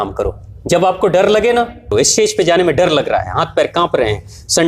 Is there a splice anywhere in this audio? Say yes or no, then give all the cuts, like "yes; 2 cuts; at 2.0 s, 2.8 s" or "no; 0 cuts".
yes; 1 cut; at 1.9 s